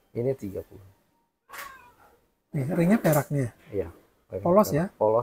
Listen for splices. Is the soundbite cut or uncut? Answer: uncut